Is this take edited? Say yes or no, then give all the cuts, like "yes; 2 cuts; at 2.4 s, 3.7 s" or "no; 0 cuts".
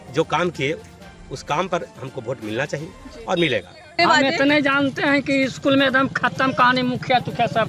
yes; 1 cut; at 3.9 s